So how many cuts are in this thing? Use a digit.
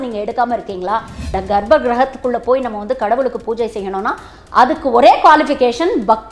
1